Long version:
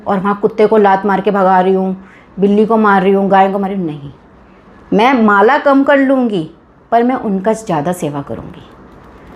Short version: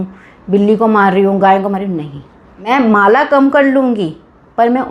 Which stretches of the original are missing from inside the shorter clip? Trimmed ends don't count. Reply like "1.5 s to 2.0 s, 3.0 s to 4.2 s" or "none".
4.6 s to 5.0 s